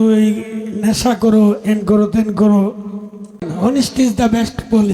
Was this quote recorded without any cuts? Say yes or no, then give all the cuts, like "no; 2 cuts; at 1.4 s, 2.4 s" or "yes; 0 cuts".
no; 1 cut; at 3.5 s